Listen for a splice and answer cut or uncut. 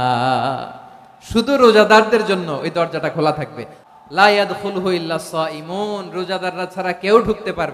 cut